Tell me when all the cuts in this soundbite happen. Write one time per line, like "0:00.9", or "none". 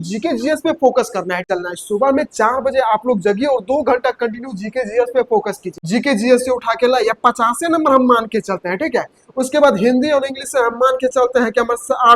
0:01.4
0:05.7